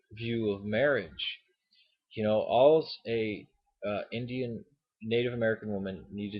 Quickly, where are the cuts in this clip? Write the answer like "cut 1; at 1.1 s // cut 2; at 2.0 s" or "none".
cut 1; at 5.0 s